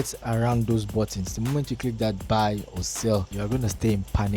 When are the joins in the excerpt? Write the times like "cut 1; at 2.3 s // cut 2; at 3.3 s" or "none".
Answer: cut 1; at 3.3 s

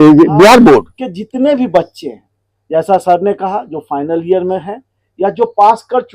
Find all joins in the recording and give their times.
cut 1; at 1.0 s

